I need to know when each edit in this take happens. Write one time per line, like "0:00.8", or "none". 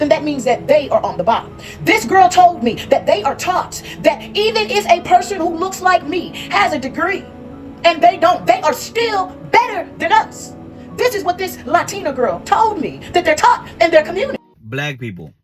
0:14.4

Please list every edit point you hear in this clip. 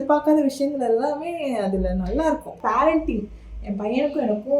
0:02.6

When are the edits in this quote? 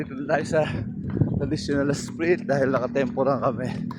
none

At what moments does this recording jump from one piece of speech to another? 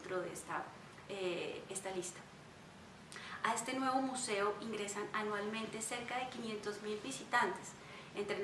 0:07.5

